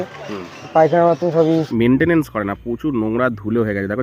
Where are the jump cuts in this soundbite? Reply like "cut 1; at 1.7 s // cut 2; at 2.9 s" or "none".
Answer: cut 1; at 1.7 s